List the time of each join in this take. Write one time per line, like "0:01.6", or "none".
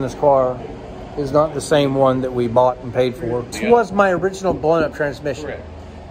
0:03.5